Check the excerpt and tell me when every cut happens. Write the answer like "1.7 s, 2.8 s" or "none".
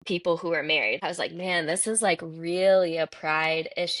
1.0 s